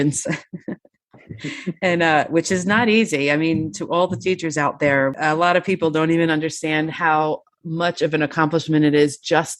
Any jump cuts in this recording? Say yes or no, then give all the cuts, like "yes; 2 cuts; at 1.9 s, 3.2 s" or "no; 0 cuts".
yes; 1 cut; at 5.1 s